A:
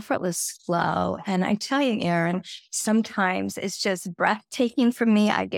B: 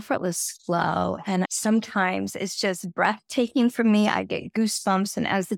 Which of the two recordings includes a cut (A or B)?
B